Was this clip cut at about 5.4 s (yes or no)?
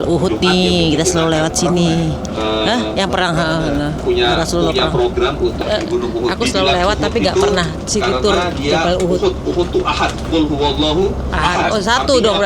no